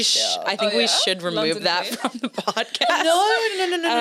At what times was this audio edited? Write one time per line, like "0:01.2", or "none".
none